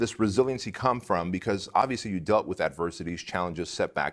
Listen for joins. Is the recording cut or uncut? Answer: uncut